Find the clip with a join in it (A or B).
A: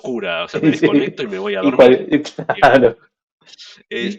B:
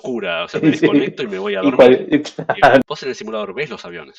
B